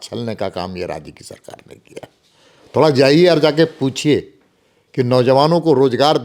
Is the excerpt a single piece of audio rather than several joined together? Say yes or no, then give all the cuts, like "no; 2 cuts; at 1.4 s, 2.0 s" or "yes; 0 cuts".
yes; 0 cuts